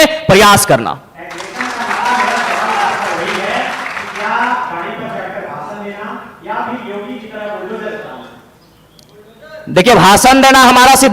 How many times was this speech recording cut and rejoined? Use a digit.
0